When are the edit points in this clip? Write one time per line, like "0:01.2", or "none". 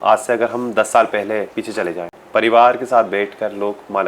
0:02.1